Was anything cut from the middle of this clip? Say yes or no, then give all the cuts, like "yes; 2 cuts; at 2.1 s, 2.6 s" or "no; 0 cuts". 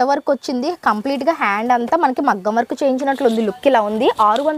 no; 0 cuts